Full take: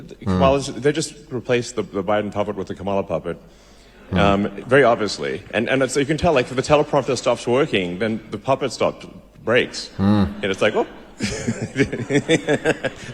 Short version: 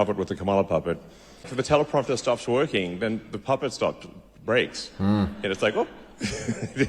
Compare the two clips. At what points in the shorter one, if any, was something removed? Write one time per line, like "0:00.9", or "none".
0:01.5